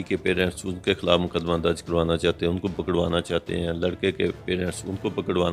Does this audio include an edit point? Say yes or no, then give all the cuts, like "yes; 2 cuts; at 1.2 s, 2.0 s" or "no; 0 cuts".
no; 0 cuts